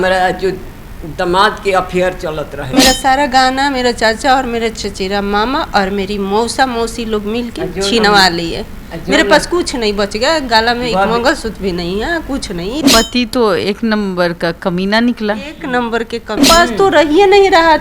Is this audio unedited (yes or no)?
no